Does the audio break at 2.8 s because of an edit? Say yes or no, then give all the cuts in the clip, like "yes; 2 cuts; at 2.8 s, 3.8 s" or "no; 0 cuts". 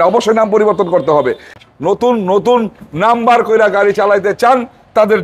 no; 1 cut; at 1.5 s